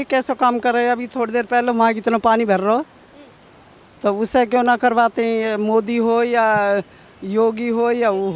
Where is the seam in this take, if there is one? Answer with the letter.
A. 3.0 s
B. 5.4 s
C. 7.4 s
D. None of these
D